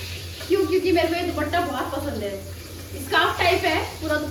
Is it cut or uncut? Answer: uncut